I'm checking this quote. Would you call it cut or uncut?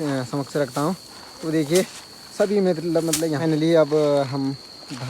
cut